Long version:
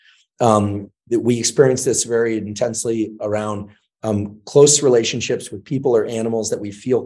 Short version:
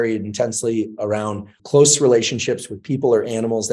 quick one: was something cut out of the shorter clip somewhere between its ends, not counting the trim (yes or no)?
yes